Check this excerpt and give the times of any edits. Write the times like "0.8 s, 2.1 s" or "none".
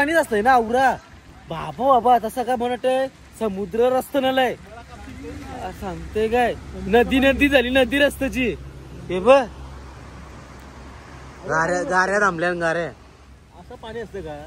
none